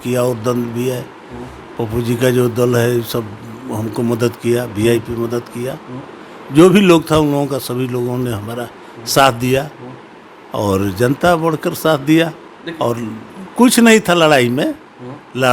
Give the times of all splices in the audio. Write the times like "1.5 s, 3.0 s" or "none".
none